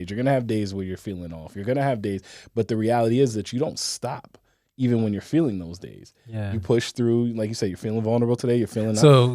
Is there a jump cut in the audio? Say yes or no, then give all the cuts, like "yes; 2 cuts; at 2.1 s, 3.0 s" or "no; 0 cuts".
no; 0 cuts